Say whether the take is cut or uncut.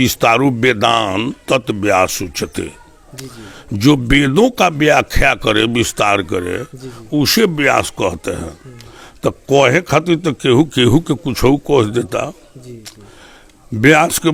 uncut